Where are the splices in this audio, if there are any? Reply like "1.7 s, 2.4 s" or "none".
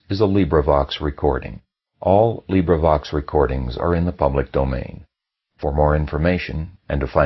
none